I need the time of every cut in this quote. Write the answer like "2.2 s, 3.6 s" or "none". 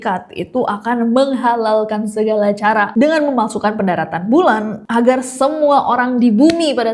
2.9 s